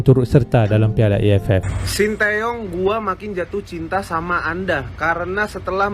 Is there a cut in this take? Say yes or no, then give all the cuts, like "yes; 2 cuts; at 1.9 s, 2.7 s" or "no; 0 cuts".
yes; 1 cut; at 1.7 s